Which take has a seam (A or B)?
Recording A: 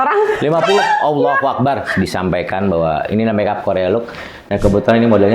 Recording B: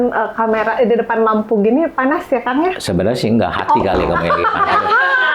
A